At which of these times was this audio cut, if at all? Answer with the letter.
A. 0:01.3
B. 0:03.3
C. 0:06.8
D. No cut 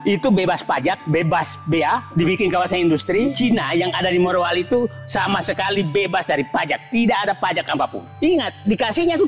B